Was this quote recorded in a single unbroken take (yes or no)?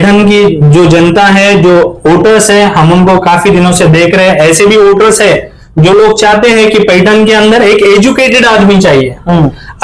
yes